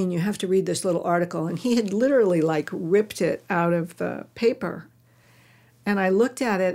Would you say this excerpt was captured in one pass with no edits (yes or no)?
yes